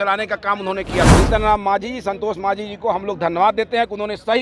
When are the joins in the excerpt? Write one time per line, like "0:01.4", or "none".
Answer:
0:01.1